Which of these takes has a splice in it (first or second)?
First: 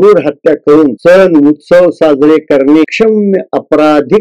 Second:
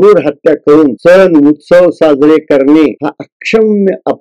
first